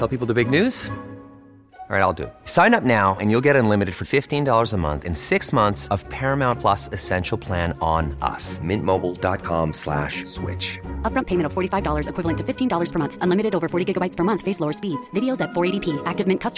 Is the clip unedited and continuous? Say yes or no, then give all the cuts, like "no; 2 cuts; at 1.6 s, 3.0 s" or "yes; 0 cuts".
yes; 0 cuts